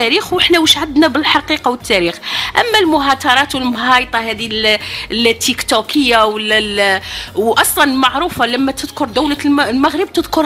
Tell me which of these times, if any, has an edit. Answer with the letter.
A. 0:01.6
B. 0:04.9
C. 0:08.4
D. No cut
D